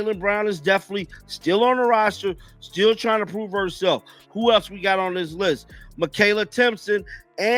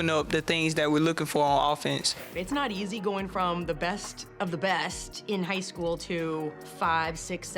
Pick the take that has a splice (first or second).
second